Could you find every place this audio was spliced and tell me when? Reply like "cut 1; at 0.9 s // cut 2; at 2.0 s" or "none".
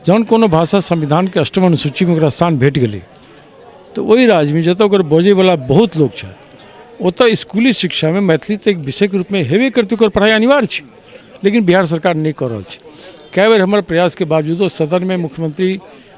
none